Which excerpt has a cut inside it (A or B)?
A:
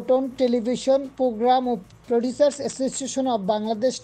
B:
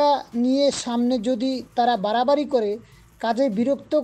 A